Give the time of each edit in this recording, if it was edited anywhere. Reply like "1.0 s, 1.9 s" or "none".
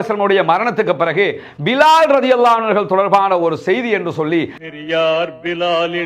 4.6 s